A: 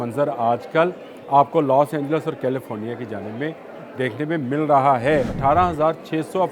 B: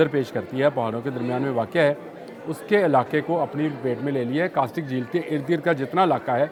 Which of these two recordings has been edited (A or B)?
A